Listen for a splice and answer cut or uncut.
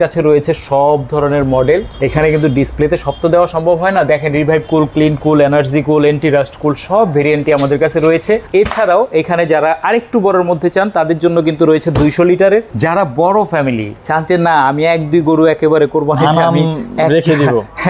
cut